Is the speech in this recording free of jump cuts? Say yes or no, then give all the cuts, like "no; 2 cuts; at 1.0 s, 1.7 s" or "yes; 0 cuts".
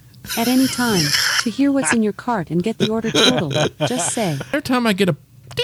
no; 1 cut; at 4.5 s